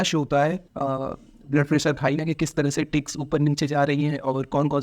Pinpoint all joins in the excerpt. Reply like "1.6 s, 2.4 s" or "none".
2.2 s